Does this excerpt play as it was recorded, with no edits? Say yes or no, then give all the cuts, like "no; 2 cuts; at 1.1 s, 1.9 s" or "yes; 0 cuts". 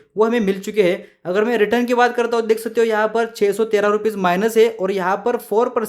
yes; 0 cuts